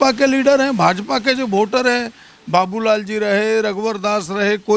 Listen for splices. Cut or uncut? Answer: uncut